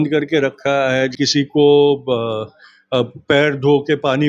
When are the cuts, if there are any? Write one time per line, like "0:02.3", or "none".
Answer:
0:01.1